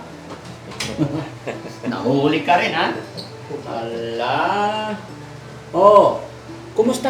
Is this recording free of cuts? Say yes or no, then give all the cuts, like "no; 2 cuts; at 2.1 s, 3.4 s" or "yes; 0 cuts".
yes; 0 cuts